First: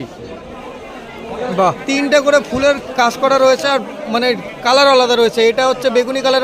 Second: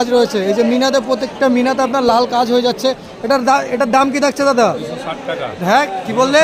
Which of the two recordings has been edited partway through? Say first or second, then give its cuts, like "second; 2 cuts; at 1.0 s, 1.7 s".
first; 1 cut; at 1.8 s